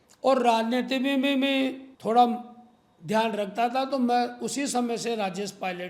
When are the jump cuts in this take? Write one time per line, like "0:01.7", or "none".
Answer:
0:01.9